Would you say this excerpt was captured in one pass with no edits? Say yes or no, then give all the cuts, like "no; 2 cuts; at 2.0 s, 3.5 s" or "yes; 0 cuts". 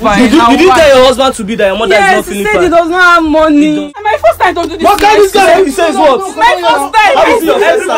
no; 1 cut; at 3.8 s